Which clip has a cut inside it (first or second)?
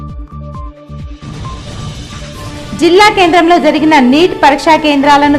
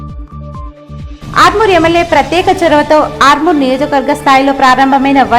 first